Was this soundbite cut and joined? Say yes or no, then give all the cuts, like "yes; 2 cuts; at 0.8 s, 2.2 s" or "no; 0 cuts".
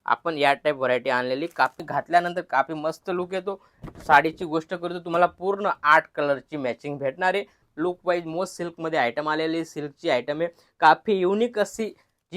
yes; 2 cuts; at 1.8 s, 7.6 s